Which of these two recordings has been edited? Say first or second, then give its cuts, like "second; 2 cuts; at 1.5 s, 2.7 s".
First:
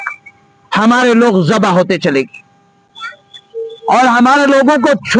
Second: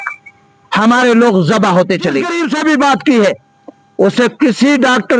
second; 1 cut; at 2.3 s